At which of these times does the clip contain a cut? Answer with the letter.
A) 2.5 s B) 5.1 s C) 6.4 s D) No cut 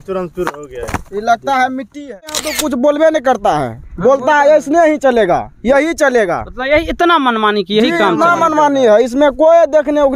A